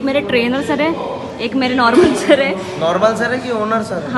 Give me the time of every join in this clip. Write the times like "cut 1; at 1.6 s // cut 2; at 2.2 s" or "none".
none